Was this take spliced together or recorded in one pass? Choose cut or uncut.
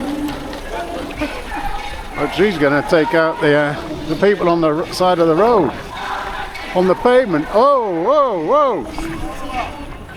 uncut